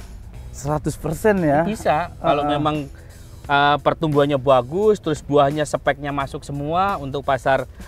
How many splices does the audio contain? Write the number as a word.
zero